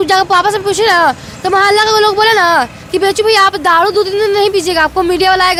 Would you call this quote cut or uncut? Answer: uncut